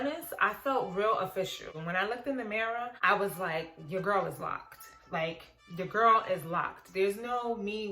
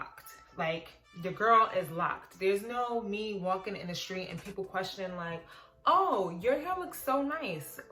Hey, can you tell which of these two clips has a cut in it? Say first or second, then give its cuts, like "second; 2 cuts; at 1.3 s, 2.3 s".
first; 2 cuts; at 1.7 s, 3.0 s